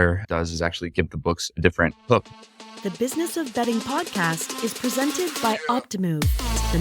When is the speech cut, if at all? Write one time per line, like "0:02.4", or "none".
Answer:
0:02.3